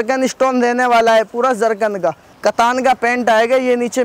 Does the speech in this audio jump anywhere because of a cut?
yes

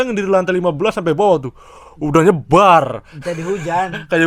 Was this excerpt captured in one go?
yes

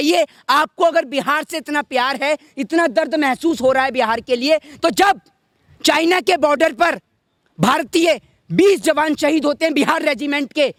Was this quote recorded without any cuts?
yes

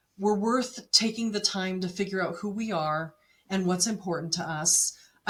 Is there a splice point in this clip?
no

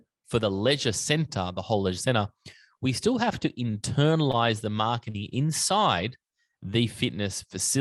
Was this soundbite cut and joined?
no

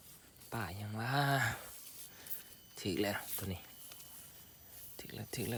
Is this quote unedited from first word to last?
yes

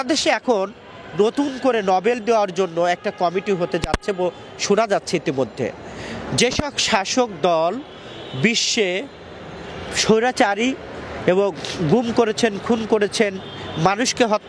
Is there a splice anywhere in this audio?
no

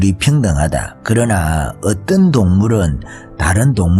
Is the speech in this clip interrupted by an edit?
no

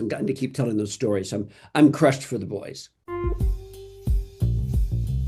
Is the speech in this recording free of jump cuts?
yes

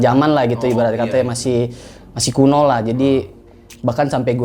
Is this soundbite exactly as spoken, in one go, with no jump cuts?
yes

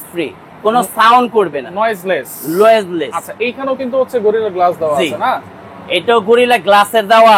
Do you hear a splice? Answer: no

